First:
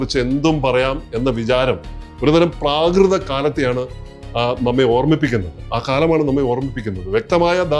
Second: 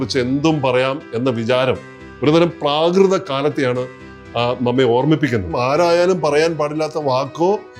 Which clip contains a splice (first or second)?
second